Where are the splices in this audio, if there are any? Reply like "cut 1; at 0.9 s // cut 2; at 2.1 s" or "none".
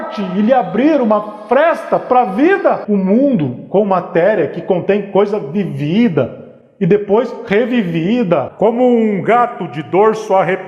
cut 1; at 2.8 s // cut 2; at 8.5 s